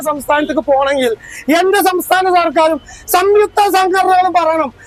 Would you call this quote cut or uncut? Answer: uncut